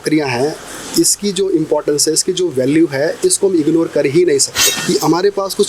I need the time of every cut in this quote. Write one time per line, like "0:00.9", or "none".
0:04.7